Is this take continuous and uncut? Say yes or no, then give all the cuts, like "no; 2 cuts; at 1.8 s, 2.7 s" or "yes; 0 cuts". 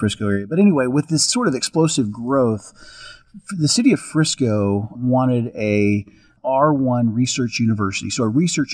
no; 1 cut; at 6.4 s